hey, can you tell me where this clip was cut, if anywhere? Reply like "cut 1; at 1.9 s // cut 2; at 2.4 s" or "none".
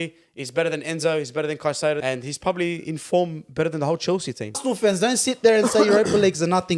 cut 1; at 2.0 s // cut 2; at 4.6 s